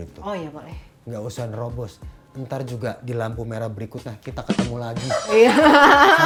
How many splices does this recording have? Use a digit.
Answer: 0